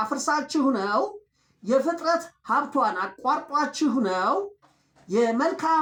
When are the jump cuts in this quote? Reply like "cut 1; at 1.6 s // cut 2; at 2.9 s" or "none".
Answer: none